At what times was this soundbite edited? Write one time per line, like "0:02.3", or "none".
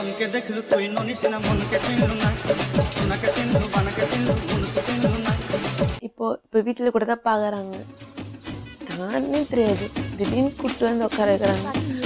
0:06.0